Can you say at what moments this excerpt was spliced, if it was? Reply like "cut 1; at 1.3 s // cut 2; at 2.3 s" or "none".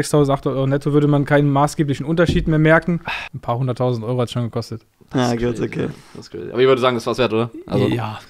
cut 1; at 3.2 s